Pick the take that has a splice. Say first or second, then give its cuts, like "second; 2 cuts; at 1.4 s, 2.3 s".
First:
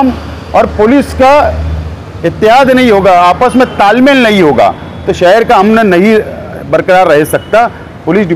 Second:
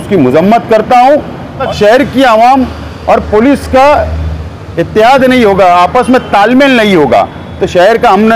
second; 1 cut; at 1.6 s